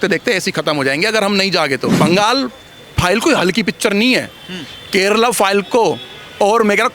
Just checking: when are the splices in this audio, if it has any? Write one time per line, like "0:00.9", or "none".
0:01.9